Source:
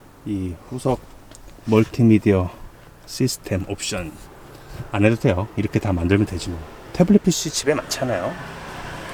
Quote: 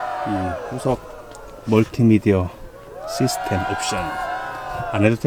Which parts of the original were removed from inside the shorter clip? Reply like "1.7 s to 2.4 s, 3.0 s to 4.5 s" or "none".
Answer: none